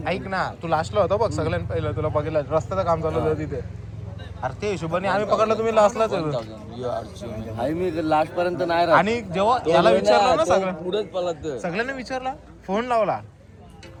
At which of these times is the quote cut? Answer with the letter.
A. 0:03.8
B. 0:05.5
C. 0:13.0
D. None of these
D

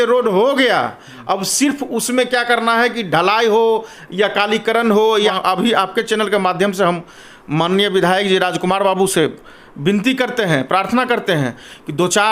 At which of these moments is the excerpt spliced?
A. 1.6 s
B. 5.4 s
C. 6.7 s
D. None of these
B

